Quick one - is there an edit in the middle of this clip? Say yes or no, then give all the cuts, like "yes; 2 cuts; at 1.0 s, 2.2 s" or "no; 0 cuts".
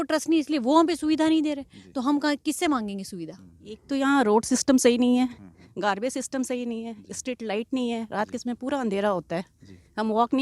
yes; 1 cut; at 3.8 s